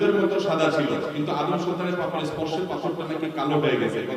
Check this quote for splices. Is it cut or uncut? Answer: uncut